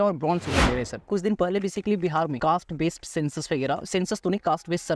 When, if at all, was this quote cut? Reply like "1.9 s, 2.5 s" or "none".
1.1 s, 2.4 s